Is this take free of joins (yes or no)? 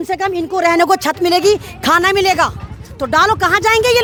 yes